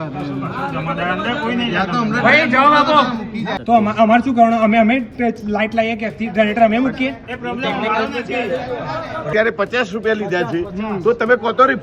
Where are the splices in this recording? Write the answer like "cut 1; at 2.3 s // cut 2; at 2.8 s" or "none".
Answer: cut 1; at 3.5 s // cut 2; at 9.3 s